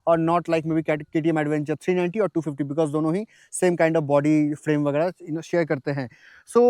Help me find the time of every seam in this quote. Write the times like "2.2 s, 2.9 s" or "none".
none